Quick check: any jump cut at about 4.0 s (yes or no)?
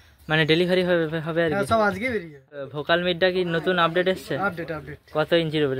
no